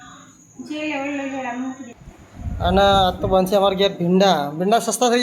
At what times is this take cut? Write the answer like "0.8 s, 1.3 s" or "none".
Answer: 1.8 s

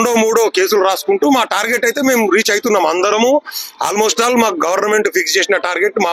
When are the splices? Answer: none

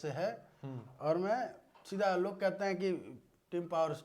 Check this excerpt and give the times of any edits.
none

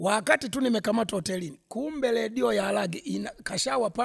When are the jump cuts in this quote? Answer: none

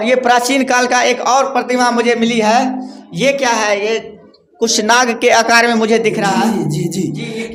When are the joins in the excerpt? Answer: none

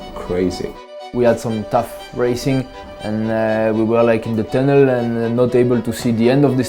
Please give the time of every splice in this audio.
1.0 s

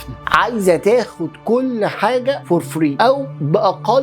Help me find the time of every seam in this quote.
2.7 s

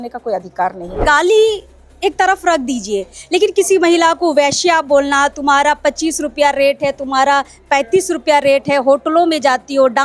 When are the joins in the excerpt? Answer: 1.0 s

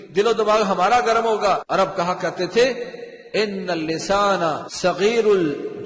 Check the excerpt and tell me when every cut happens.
1.6 s, 4.7 s

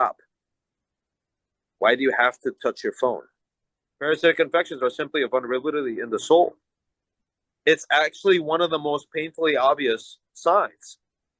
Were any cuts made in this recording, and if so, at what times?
4.1 s

